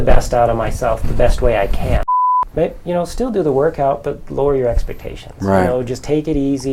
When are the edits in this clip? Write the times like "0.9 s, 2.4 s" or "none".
2.1 s